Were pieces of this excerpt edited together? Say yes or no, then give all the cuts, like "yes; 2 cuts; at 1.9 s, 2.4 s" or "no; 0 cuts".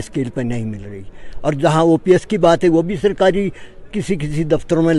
no; 0 cuts